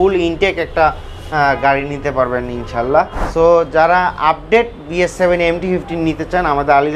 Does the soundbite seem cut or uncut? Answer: cut